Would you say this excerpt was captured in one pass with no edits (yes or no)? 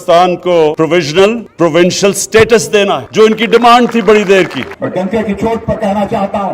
no